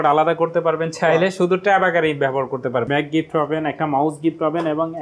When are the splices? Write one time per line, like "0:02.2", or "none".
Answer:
0:02.9

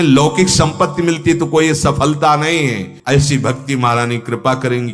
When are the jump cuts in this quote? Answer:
0:02.9

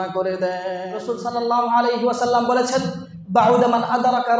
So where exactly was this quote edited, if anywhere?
0:01.0

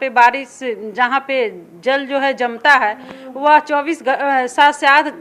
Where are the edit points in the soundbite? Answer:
none

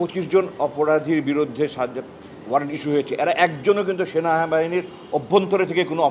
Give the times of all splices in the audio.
none

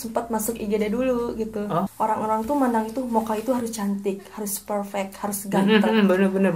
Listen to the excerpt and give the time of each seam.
0:01.9

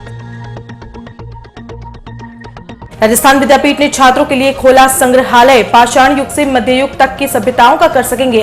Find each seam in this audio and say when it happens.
0:02.8

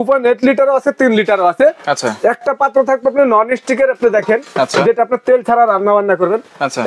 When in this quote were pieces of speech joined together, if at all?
none

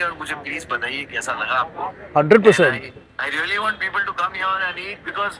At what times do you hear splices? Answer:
none

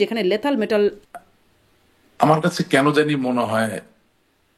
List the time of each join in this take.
0:01.0

